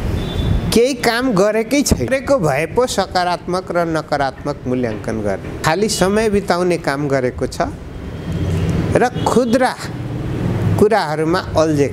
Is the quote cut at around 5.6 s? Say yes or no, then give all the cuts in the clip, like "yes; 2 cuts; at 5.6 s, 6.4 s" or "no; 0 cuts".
yes; 2 cuts; at 2.1 s, 5.6 s